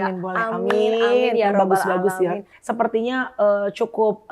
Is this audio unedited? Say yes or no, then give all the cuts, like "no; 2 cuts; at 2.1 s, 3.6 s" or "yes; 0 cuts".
no; 1 cut; at 2.5 s